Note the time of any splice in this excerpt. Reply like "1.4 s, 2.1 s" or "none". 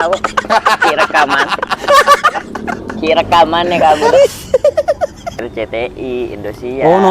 5.5 s